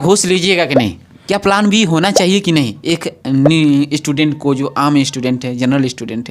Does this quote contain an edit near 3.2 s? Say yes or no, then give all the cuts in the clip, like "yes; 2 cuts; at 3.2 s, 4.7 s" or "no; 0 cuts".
no; 1 cut; at 1.2 s